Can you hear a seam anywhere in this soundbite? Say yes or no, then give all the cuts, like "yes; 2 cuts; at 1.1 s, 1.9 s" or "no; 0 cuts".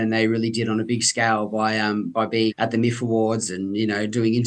yes; 1 cut; at 2.5 s